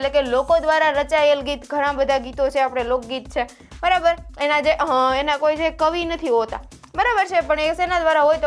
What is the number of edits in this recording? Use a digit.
0